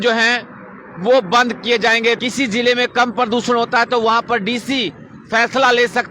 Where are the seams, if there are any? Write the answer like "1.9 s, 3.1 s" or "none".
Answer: 2.2 s

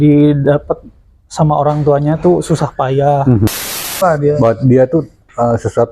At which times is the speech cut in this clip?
4.0 s

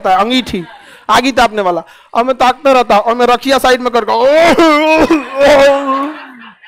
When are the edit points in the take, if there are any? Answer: none

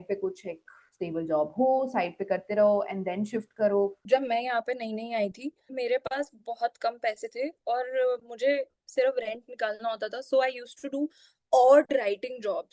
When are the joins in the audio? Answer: 4.0 s, 5.7 s

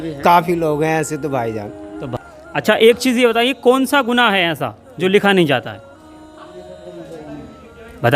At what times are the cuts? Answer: 2.1 s

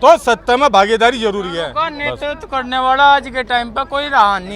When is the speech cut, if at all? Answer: 1.7 s

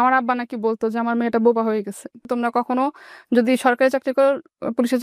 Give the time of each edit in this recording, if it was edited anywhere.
2.2 s

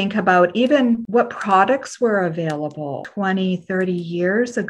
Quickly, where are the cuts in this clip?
1.0 s, 3.0 s

